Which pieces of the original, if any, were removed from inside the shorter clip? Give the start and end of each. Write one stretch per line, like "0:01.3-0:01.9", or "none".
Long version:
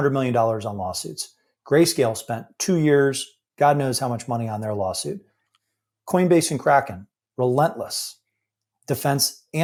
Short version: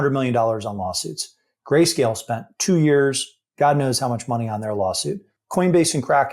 0:05.3-0:05.9